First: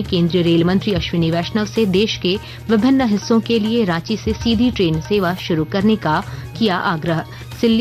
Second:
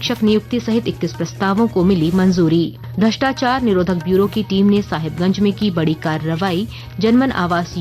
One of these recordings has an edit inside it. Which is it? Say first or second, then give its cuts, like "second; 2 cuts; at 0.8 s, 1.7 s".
second; 1 cut; at 2.8 s